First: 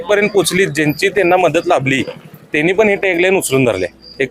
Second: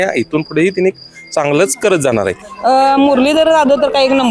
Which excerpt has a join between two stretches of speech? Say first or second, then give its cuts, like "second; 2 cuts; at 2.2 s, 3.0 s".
second; 1 cut; at 2.4 s